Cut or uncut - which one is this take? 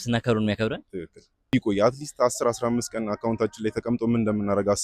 cut